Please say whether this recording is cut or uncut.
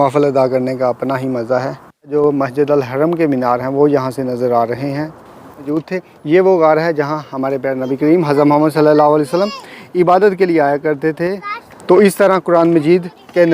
cut